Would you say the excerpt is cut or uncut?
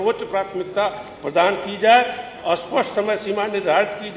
uncut